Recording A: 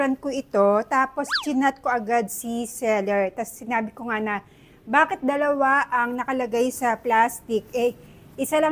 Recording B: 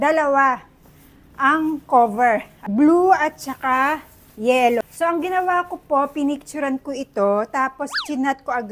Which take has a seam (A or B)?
B